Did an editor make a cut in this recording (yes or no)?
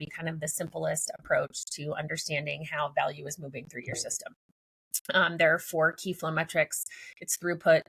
no